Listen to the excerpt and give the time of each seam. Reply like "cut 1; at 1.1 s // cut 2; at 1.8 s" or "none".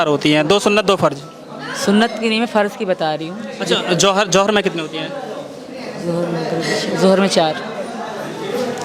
none